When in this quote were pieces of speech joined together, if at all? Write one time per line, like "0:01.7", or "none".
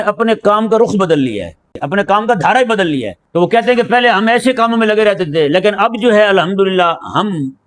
0:01.8
0:03.2